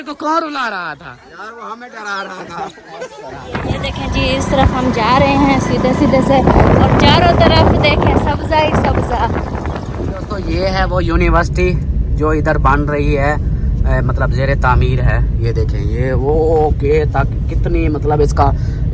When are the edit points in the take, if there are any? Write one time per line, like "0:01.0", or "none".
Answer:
0:03.5
0:10.4

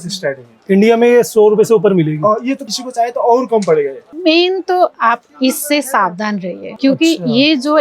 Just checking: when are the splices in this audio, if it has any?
0:02.7
0:04.1
0:06.7

